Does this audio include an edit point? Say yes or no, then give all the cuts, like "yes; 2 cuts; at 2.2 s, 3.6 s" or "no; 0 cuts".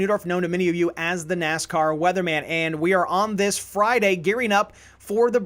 no; 0 cuts